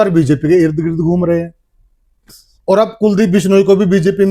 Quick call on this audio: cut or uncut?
cut